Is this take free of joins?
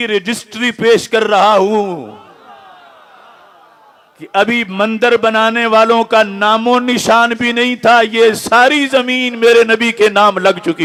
yes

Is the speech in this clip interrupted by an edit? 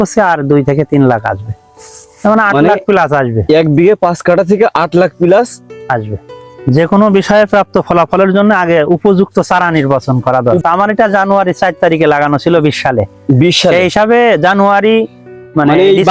yes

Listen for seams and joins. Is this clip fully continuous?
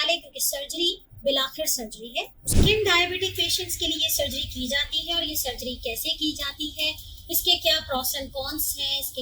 no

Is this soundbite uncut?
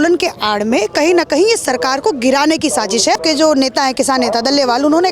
no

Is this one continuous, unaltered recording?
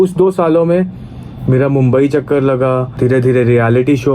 no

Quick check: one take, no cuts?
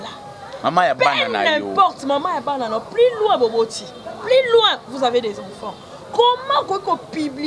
yes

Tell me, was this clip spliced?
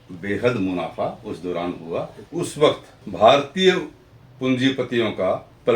yes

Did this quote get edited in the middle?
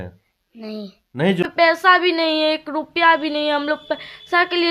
yes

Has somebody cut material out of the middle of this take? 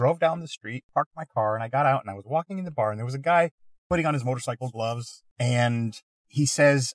no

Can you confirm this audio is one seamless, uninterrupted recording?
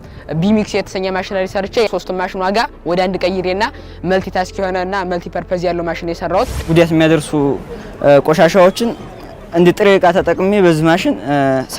no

